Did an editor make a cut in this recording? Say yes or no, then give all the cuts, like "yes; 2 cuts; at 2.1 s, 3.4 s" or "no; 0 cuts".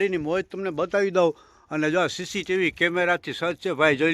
no; 0 cuts